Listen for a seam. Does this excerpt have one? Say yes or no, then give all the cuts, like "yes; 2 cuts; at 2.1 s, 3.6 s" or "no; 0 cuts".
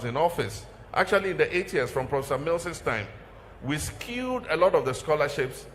yes; 1 cut; at 4.7 s